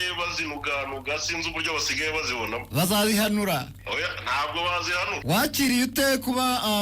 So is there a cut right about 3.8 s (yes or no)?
yes